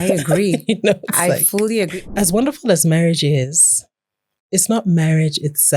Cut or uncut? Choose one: cut